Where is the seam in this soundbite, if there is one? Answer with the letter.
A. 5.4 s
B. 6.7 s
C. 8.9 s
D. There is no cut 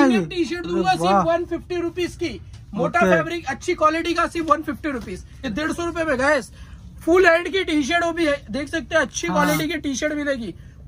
A